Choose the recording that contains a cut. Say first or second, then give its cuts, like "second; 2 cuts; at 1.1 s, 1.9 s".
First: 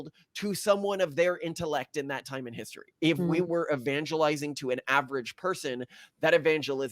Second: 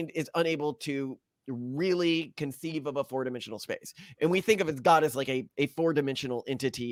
first; 1 cut; at 2.9 s